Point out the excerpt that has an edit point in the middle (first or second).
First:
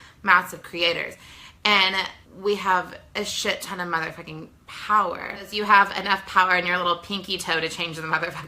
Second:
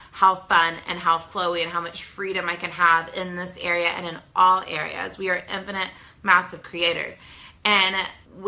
first